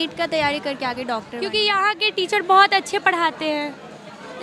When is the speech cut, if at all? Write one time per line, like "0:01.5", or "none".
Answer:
0:01.3